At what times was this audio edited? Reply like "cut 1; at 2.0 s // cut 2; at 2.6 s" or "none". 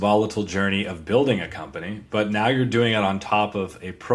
none